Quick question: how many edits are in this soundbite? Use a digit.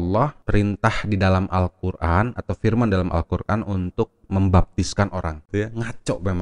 1